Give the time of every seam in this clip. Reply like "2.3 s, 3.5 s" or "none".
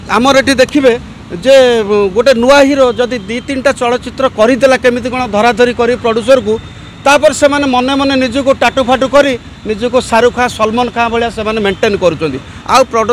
none